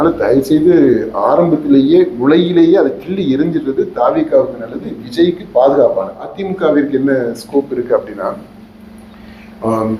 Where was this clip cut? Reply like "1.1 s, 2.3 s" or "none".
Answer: 6.4 s